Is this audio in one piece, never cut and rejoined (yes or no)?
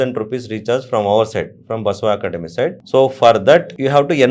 yes